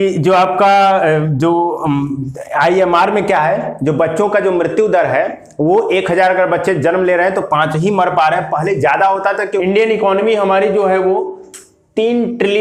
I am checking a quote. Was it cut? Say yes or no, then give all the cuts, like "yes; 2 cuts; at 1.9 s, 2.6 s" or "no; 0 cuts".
yes; 1 cut; at 9.6 s